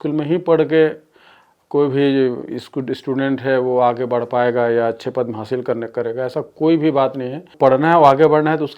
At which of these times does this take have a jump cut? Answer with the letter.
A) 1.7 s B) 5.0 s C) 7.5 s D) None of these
C